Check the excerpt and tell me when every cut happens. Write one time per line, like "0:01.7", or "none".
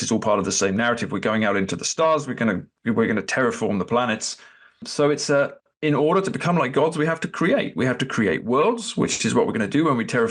0:04.9
0:05.6

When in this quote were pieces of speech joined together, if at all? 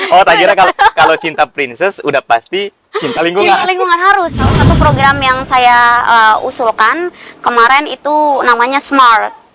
0:04.5

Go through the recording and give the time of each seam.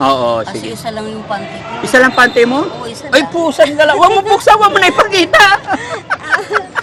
none

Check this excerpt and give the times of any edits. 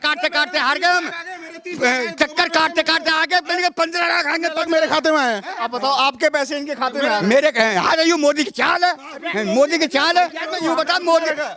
0:04.6
0:10.6

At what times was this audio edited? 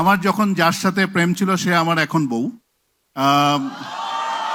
none

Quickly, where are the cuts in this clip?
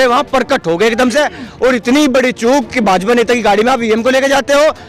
none

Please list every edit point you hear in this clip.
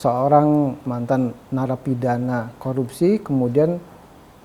0:00.9

